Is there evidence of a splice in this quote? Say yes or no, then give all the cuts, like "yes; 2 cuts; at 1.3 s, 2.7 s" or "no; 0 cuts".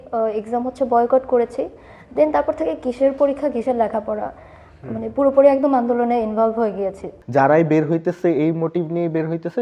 yes; 1 cut; at 7.1 s